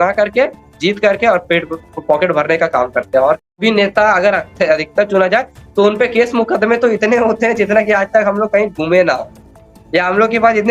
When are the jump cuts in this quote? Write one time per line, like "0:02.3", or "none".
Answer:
0:03.6